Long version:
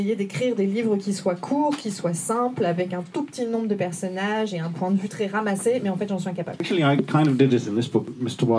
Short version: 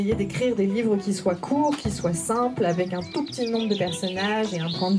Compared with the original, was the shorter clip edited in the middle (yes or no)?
no